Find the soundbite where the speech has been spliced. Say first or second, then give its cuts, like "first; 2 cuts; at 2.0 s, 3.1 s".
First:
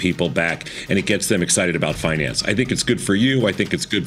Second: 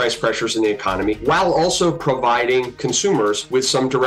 second; 2 cuts; at 1.2 s, 3.1 s